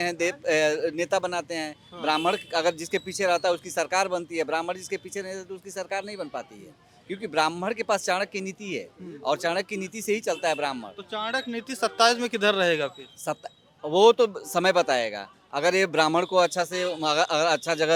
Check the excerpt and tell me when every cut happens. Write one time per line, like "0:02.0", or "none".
none